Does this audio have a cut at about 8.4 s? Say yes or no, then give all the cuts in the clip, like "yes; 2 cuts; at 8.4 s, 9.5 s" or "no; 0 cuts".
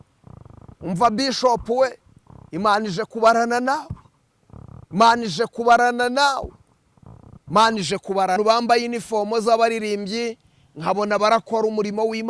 yes; 1 cut; at 8.4 s